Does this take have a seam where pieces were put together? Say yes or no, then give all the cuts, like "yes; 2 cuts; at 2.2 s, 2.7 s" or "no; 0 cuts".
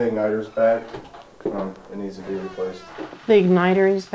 no; 0 cuts